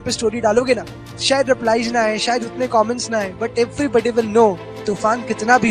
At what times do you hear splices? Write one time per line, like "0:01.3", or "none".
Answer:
0:00.9
0:04.8